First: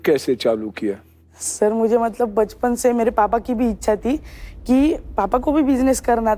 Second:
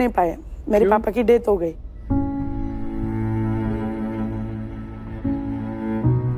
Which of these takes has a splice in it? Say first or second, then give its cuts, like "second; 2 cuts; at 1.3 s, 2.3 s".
second; 1 cut; at 1.9 s